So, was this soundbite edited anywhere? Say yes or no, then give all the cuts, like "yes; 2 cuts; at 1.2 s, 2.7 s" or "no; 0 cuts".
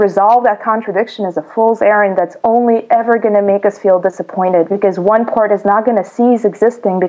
no; 0 cuts